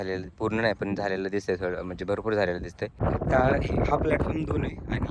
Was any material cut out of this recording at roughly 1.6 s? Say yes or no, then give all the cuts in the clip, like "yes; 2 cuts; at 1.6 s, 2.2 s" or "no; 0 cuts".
no; 1 cut; at 3.0 s